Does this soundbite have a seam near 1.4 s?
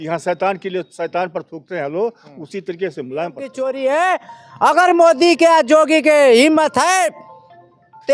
no; 1 cut; at 3.4 s

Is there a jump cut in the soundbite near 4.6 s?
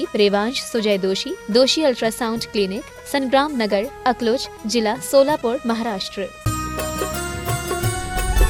no; 1 cut; at 6.4 s

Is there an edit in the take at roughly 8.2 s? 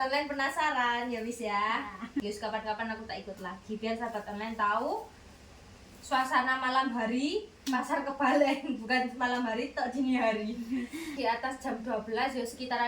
no; 2 cuts; at 2.2 s, 11.1 s

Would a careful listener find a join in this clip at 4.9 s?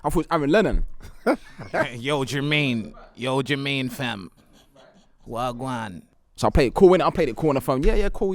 no; 1 cut; at 6.2 s

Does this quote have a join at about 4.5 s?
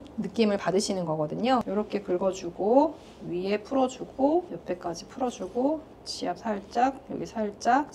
yes; 2 cuts; at 1.7 s, 4.5 s

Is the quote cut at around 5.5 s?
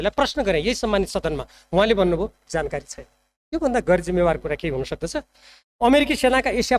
no; 0 cuts

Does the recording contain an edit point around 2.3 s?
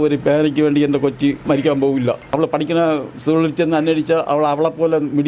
yes; 2 cuts; at 1.4 s, 2.3 s

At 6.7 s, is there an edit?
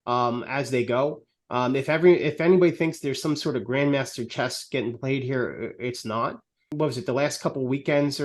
yes; 1 cut; at 6.7 s

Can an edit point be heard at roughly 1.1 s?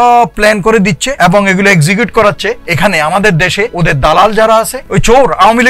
yes; 4 cuts; at 1.1 s, 2.7 s, 3.7 s, 4.8 s

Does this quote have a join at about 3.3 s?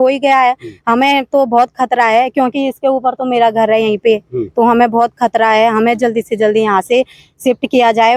no; 0 cuts

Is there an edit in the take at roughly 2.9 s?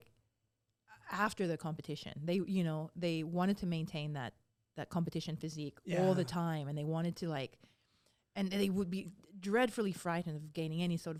no; 0 cuts

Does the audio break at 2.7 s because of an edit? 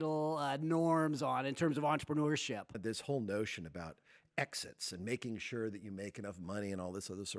yes; 1 cut; at 2.7 s

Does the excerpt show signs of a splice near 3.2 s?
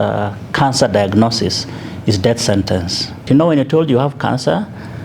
yes; 1 cut; at 3.2 s

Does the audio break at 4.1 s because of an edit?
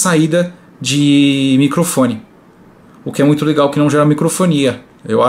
no; 0 cuts

